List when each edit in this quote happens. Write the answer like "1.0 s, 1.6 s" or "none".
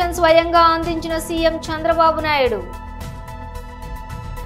2.8 s